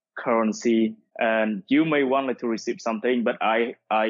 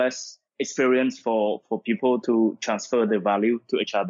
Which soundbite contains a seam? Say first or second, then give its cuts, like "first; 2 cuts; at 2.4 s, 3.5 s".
first; 1 cut; at 1.0 s